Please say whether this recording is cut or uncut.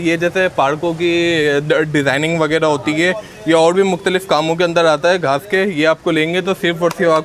uncut